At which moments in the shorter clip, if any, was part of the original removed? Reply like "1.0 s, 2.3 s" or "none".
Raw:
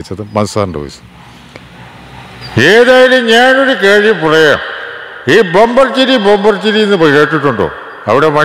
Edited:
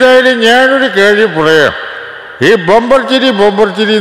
none

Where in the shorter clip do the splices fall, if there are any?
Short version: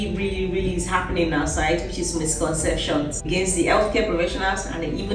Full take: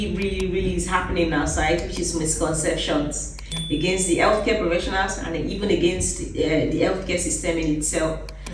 3.3 s

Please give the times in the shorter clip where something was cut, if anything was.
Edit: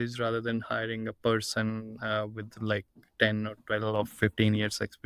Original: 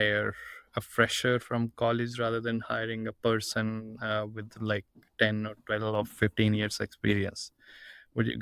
none

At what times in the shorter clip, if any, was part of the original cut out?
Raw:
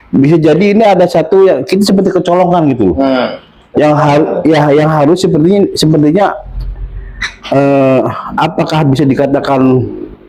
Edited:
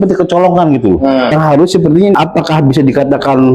1.3 s, 2.2 s

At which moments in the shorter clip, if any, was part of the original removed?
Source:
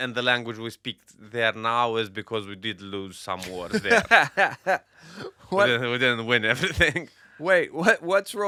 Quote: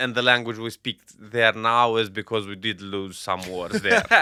none

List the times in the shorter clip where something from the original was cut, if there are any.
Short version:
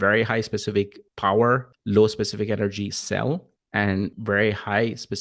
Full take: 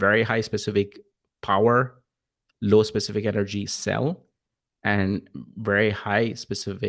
1.0 s, 1.7 s, 4.0 s

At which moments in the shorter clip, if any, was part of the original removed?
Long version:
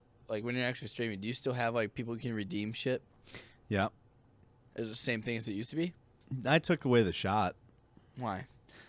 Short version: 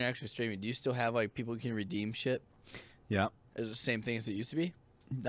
3.4 s

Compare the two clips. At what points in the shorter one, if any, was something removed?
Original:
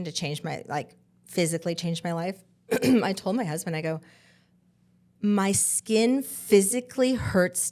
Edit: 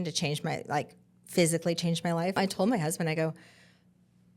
2.4 s

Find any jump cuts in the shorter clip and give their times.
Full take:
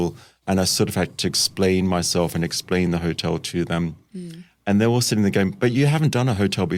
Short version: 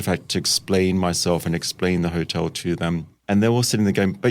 3.1 s

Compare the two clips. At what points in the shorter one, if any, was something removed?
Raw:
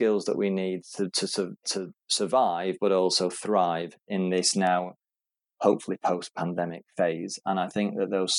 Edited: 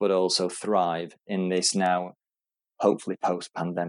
none

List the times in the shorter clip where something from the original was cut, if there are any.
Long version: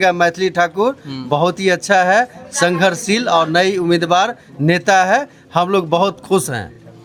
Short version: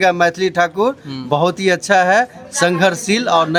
none

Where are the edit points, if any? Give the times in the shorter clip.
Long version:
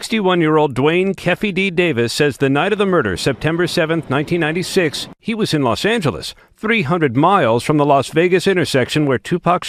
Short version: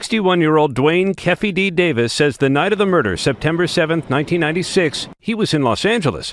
none

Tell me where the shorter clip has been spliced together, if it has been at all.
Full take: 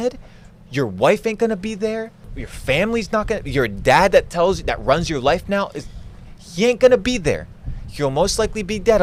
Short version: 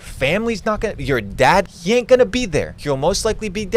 1.6 s, 2.7 s

